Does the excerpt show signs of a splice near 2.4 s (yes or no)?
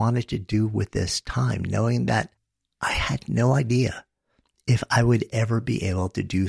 no